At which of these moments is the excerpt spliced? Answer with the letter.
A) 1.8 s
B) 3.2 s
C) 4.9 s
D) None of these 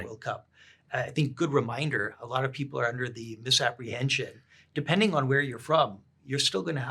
D